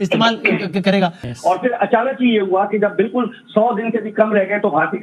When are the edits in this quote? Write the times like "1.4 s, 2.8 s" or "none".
1.3 s